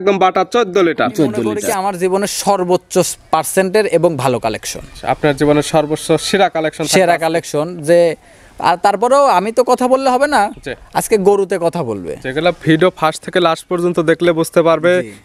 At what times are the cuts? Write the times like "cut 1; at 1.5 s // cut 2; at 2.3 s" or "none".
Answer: cut 1; at 1.6 s